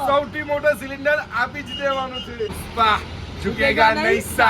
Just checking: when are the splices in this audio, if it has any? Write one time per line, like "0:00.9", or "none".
0:02.5